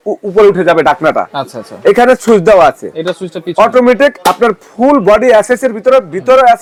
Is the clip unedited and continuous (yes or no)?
yes